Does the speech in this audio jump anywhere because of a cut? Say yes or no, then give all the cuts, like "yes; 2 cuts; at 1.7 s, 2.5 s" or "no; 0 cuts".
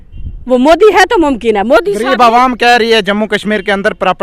no; 0 cuts